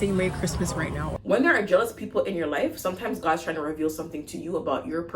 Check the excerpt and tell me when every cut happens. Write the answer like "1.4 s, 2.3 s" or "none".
1.0 s